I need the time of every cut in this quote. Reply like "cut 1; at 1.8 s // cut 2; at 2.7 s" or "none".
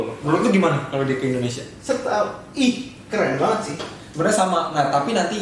cut 1; at 4.0 s